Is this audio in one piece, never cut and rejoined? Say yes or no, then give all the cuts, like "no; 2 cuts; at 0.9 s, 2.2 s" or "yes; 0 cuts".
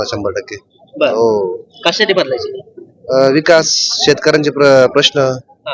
yes; 0 cuts